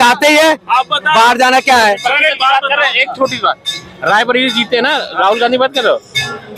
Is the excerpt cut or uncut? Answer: uncut